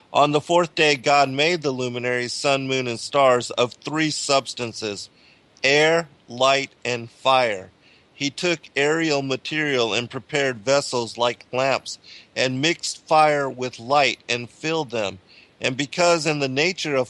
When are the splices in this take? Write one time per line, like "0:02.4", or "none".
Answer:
0:09.1